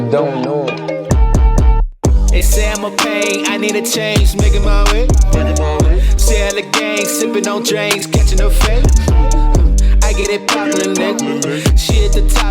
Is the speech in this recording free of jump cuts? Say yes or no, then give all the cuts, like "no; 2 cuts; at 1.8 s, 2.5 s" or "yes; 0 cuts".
no; 1 cut; at 1.0 s